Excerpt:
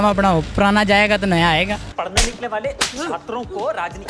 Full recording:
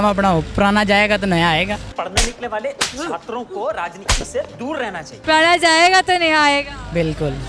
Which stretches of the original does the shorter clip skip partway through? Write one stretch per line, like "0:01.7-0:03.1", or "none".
none